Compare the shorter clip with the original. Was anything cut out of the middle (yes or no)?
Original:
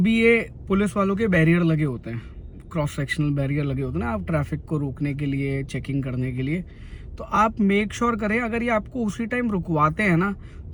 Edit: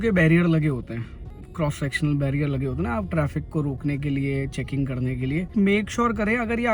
yes